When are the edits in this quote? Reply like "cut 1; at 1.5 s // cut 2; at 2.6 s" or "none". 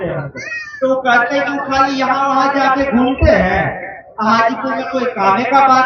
none